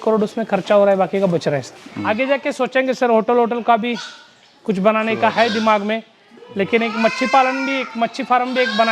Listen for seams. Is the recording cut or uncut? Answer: cut